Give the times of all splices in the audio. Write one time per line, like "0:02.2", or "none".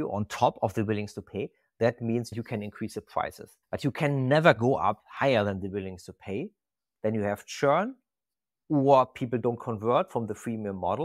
0:02.4
0:03.6